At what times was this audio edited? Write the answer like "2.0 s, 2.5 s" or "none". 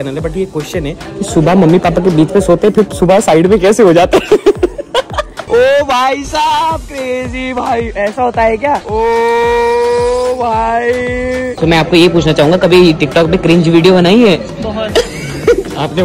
5.4 s, 8.8 s, 11.6 s